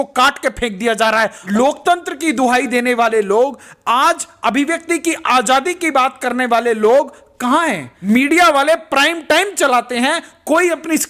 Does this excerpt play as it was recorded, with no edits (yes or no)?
no